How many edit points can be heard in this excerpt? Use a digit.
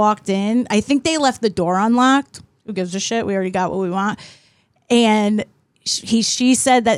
0